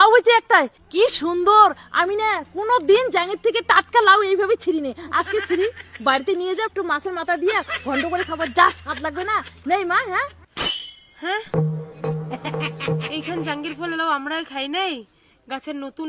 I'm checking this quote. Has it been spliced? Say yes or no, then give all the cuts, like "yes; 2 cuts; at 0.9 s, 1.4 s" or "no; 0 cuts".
no; 0 cuts